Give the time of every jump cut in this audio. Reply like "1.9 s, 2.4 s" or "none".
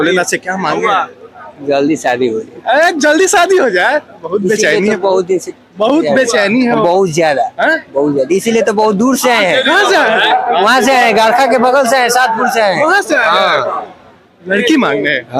none